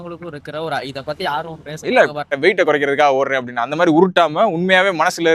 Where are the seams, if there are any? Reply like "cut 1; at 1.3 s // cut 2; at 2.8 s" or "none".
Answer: cut 1; at 2.4 s

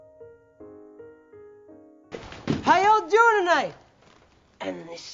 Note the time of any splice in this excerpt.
cut 1; at 2.0 s

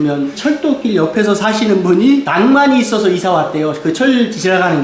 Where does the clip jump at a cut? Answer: none

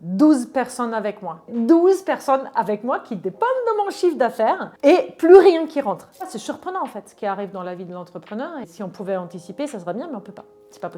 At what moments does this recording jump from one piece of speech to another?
cut 1; at 1.5 s // cut 2; at 6.3 s // cut 3; at 8.7 s

